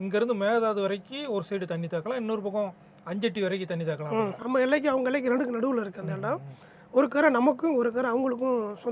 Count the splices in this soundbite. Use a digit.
1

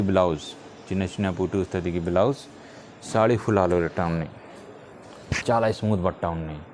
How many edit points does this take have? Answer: 0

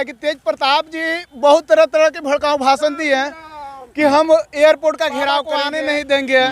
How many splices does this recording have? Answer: 1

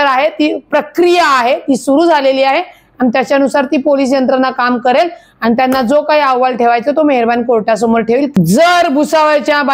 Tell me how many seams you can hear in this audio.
1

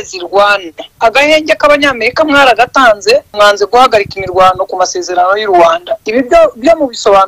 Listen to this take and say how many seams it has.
2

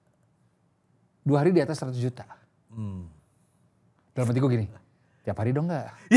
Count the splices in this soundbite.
0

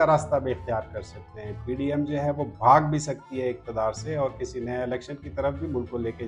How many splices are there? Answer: 0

